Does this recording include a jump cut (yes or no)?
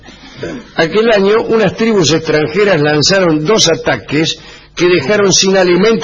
yes